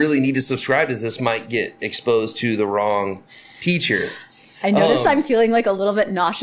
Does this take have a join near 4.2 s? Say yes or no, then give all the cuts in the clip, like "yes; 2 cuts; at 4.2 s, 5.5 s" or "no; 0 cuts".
no; 0 cuts